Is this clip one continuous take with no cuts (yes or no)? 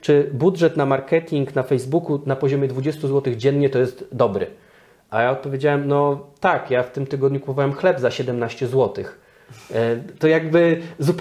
yes